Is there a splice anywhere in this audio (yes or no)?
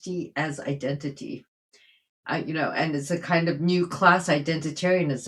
no